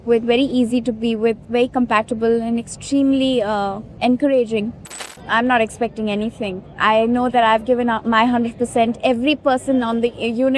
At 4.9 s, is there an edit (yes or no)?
yes